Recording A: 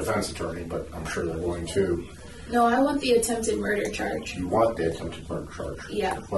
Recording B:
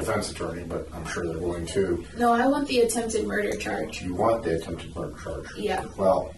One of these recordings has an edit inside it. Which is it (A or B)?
B